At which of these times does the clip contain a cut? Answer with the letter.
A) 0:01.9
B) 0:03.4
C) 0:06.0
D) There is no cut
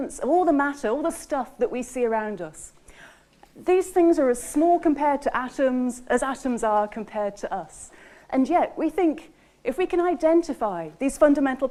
D